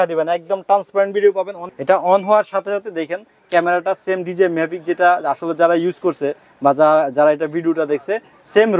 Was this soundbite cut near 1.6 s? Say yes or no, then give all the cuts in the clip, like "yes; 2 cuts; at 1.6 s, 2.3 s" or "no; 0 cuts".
yes; 1 cut; at 1.6 s